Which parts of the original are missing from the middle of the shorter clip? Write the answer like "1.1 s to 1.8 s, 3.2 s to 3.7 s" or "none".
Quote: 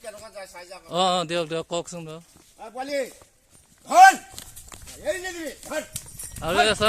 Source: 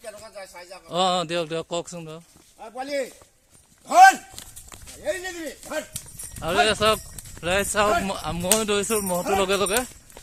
none